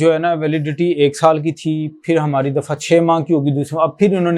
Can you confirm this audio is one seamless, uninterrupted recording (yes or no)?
yes